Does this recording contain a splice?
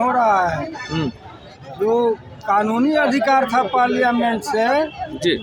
no; 0 cuts

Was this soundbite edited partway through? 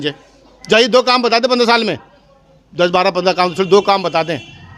no; 0 cuts

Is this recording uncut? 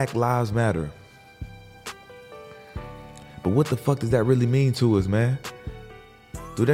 yes; 0 cuts

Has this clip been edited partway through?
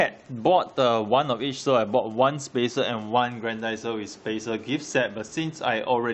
no; 0 cuts

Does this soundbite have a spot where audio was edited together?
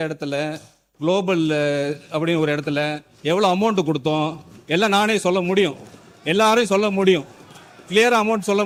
no; 0 cuts

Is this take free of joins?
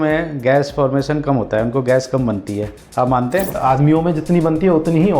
no; 1 cut; at 3.6 s

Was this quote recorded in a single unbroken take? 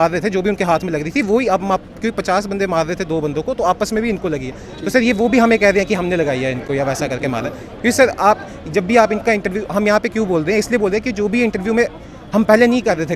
yes; 0 cuts

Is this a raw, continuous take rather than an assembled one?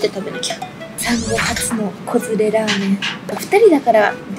yes; 0 cuts

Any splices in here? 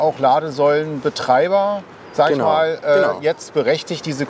no; 0 cuts

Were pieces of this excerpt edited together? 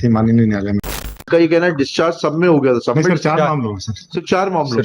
yes; 1 cut; at 1.2 s

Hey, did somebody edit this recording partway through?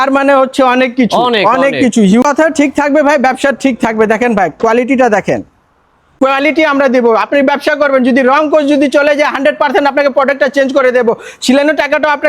yes; 2 cuts; at 2.2 s, 6.1 s

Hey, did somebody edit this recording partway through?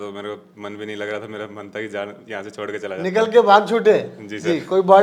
no; 0 cuts

